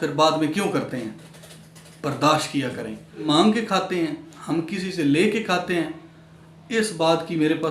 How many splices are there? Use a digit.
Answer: 1